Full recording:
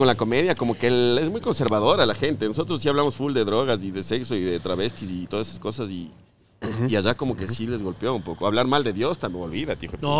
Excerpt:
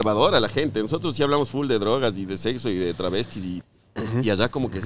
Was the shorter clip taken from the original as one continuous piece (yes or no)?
no